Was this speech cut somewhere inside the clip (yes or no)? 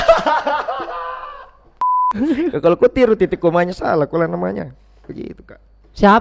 yes